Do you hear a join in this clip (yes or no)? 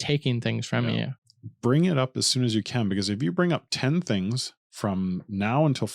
yes